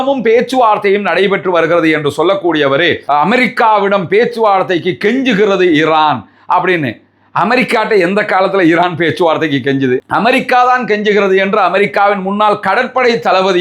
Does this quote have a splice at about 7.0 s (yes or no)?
no